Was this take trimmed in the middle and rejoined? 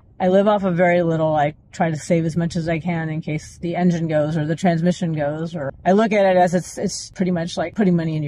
yes; 2 cuts; at 5.7 s, 7.2 s

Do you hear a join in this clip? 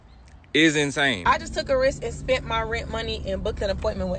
yes; 1 cut; at 1.2 s

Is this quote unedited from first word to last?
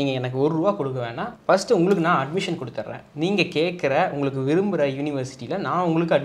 yes; 0 cuts

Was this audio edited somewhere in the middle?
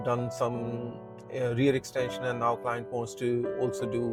no; 0 cuts

